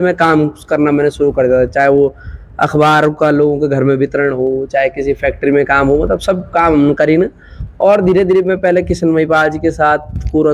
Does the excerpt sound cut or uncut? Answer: uncut